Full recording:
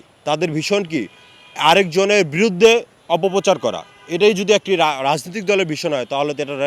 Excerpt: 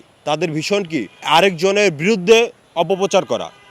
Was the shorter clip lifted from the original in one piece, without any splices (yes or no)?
no